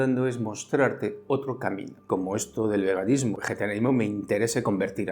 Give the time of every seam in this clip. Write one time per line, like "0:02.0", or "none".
0:02.1
0:03.4